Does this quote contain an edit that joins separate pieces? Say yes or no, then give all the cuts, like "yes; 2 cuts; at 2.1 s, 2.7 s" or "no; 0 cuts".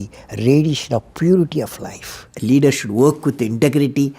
yes; 1 cut; at 2.2 s